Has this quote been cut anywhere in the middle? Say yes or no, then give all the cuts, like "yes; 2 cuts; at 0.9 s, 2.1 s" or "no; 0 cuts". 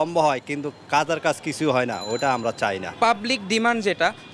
yes; 1 cut; at 2.9 s